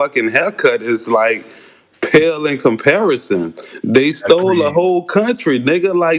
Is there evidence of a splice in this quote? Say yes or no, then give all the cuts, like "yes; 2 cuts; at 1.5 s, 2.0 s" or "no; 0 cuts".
no; 0 cuts